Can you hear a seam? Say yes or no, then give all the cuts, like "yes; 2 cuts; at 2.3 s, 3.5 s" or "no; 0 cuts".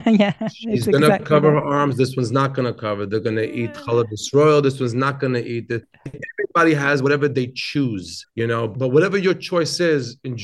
yes; 2 cuts; at 5.9 s, 8.7 s